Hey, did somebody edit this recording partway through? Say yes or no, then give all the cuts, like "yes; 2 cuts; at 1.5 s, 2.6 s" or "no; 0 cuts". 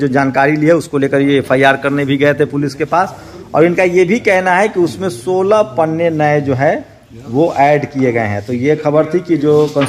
no; 0 cuts